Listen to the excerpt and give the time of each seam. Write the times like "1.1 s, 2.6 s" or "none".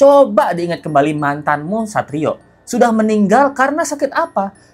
none